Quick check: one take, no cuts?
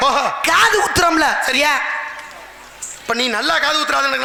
yes; 0 cuts

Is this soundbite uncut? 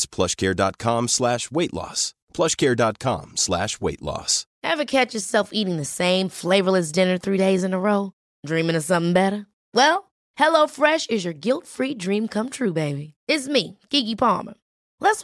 no; 1 cut; at 4.4 s

